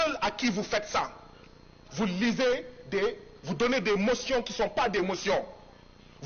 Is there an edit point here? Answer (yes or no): no